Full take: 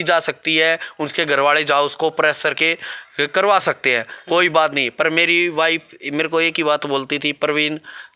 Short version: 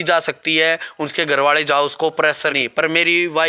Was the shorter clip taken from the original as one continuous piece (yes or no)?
no